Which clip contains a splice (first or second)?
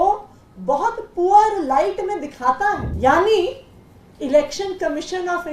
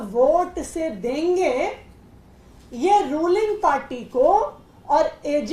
first